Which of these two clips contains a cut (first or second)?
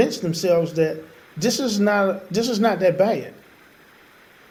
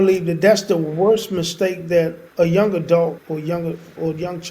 second